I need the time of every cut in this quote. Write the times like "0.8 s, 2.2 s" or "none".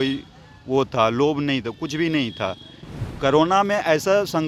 none